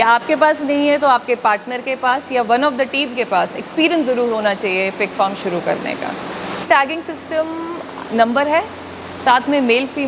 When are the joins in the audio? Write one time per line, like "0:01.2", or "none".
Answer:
0:06.7